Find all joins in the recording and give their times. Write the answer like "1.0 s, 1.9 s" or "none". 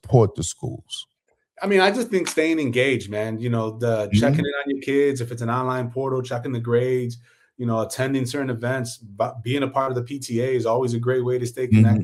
none